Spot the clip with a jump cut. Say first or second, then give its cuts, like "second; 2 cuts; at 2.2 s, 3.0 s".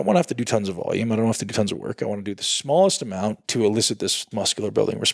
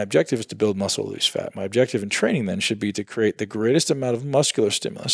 first; 2 cuts; at 3.4 s, 4.2 s